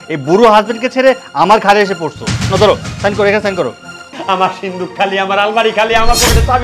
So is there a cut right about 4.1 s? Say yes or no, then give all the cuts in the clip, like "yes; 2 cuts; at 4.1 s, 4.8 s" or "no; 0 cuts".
yes; 1 cut; at 4.1 s